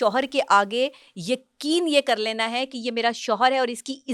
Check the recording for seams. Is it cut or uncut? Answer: uncut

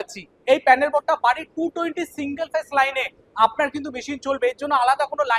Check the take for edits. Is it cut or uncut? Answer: uncut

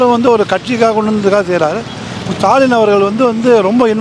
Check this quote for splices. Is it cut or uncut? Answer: uncut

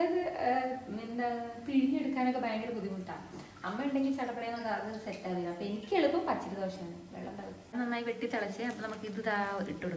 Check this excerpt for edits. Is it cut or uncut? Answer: cut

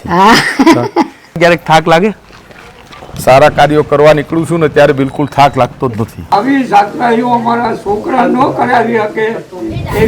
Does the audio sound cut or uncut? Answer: cut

